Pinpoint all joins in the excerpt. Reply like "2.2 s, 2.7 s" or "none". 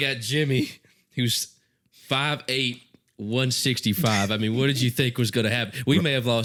none